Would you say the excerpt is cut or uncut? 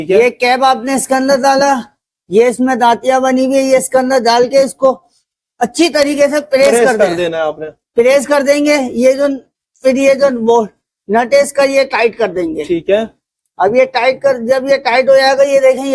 uncut